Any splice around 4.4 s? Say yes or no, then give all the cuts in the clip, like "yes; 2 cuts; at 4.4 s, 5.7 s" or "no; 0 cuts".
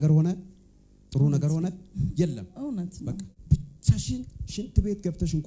yes; 2 cuts; at 3.3 s, 4.4 s